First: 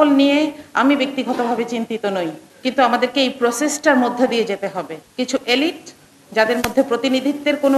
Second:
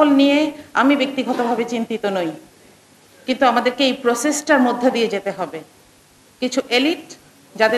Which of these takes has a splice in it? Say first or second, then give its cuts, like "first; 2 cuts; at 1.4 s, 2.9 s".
first; 2 cuts; at 2.5 s, 5.0 s